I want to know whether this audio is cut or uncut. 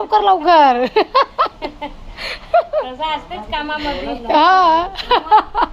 uncut